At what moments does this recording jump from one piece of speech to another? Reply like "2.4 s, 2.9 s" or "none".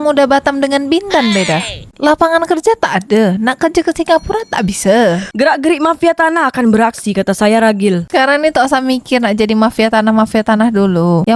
5.3 s